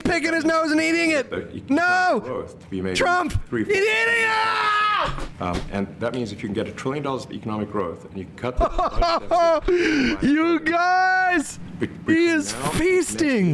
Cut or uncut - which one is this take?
uncut